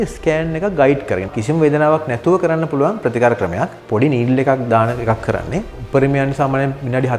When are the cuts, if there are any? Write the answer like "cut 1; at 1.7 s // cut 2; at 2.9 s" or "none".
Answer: cut 1; at 1.3 s // cut 2; at 3.8 s // cut 3; at 5.8 s